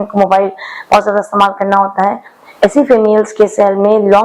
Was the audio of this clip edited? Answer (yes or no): no